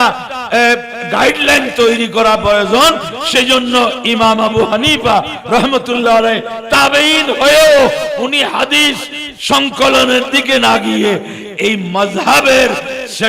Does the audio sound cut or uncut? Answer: uncut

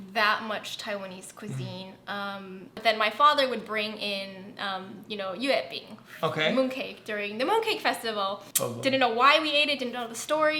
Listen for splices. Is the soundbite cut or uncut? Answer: cut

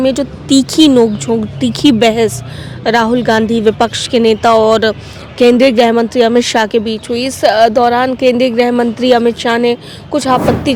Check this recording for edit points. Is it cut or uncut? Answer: uncut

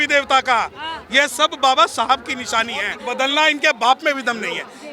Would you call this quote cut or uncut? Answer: cut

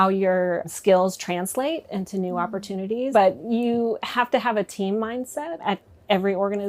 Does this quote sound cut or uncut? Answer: cut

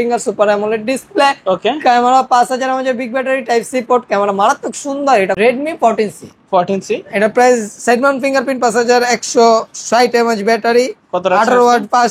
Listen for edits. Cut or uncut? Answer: cut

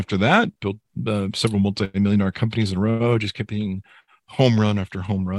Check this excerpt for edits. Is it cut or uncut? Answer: uncut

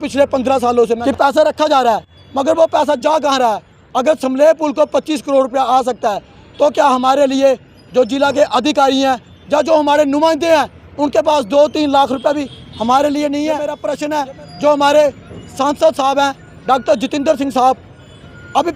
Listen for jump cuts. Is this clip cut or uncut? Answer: cut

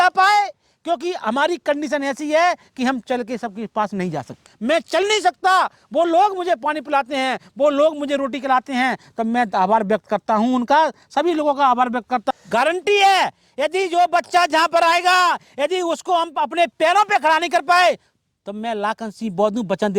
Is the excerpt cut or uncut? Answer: cut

